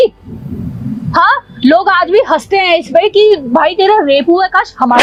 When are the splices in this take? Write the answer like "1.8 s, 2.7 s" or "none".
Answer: none